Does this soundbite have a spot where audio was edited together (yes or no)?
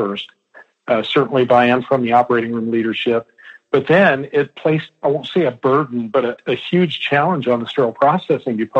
yes